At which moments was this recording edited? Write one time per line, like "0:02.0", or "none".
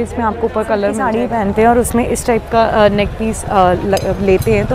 0:01.0